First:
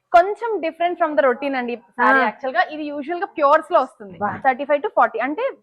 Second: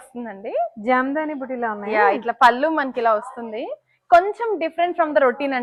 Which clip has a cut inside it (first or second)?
first